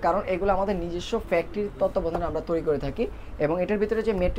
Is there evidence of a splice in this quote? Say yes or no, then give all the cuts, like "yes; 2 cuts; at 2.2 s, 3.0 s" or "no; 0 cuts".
no; 0 cuts